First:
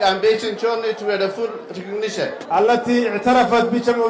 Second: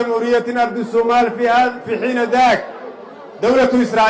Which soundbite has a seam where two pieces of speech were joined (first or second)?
first